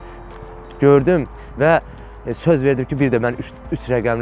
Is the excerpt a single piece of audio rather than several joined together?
yes; 0 cuts

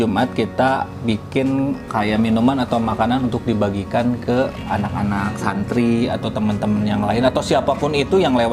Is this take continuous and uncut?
yes; 0 cuts

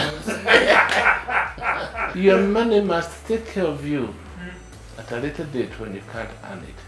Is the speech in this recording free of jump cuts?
no; 1 cut; at 2.1 s

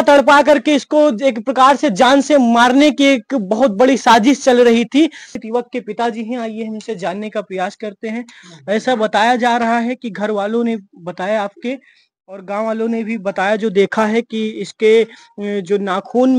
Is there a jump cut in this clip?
yes; 1 cut; at 5.4 s

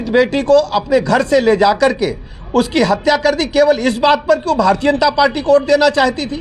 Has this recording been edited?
no; 0 cuts

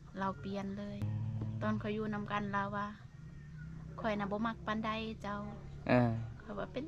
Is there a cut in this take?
yes; 1 cut; at 1.1 s

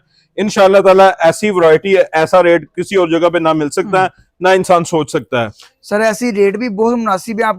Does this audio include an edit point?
no; 0 cuts

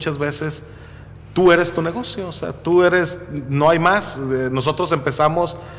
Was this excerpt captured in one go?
yes; 0 cuts

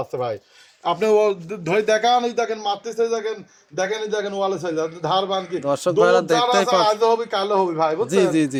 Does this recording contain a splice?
no; 0 cuts

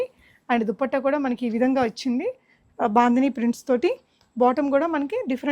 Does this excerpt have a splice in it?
no; 0 cuts

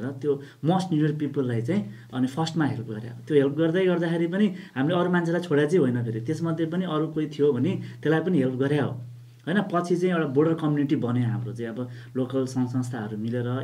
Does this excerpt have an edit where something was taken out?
no; 0 cuts

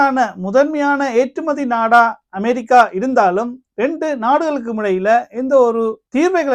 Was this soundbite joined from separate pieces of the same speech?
no; 0 cuts

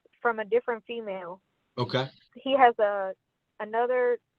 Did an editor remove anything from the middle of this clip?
yes; 1 cut; at 2.3 s

